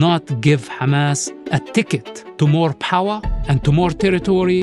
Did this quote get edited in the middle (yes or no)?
yes